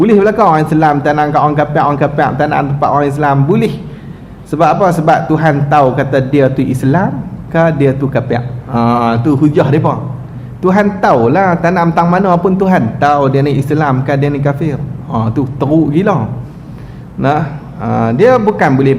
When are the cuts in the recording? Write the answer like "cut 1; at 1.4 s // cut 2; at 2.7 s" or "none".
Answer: none